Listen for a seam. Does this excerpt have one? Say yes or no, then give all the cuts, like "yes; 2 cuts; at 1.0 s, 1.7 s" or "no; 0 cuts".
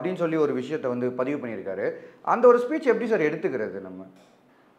no; 0 cuts